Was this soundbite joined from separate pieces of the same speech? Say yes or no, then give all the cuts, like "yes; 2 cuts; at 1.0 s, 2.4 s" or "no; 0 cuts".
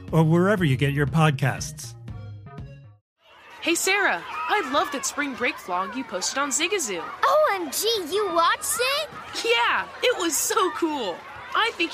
yes; 1 cut; at 3.1 s